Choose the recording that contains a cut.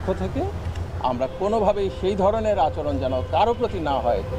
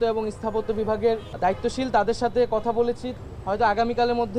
second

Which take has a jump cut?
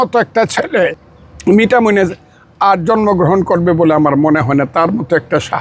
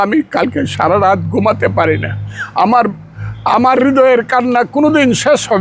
first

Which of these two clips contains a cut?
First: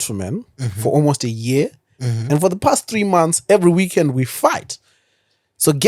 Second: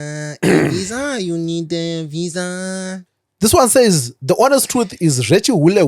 second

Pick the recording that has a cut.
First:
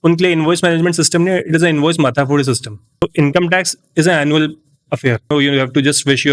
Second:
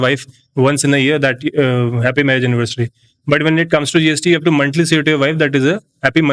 first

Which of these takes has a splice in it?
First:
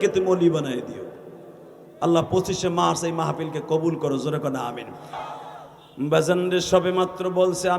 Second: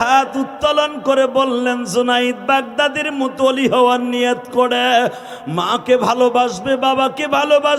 first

